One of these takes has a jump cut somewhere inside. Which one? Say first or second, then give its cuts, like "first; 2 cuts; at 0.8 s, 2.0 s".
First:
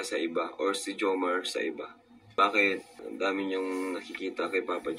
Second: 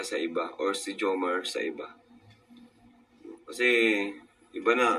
first; 1 cut; at 2.4 s